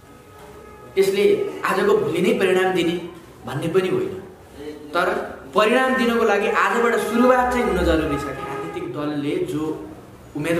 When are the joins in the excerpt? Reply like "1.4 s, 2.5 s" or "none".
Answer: 8.6 s